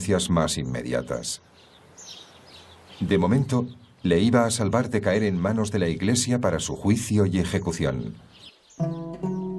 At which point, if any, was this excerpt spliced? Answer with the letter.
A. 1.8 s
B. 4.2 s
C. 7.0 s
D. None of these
D